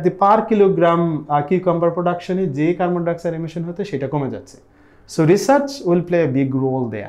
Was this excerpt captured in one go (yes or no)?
yes